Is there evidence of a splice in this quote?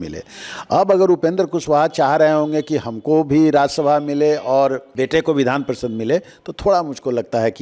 yes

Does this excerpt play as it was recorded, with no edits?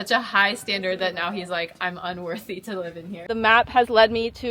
no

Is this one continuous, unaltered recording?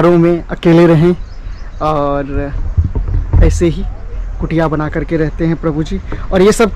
yes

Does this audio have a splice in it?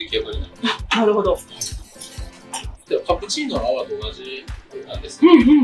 no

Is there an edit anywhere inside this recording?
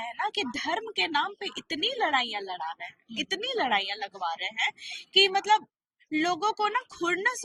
no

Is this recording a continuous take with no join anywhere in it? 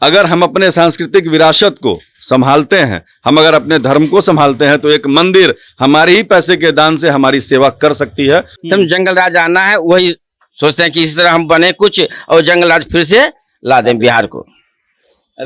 no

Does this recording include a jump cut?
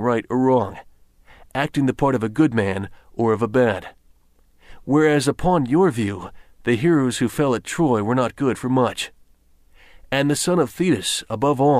no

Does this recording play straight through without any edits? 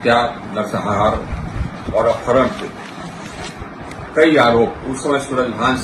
no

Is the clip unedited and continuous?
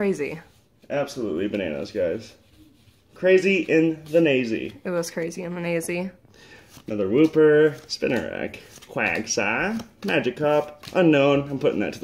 no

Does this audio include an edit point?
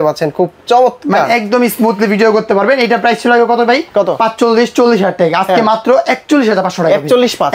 no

